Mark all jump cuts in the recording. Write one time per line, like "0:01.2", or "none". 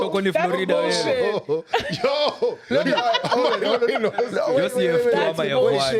none